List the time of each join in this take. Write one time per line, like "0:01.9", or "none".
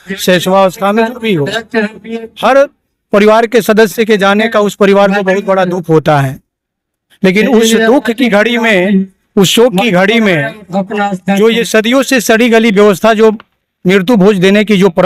none